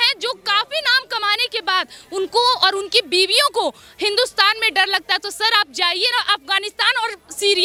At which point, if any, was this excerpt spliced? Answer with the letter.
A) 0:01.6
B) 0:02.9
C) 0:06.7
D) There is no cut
D